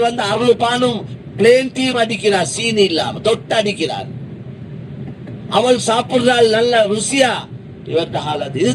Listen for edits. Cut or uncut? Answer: uncut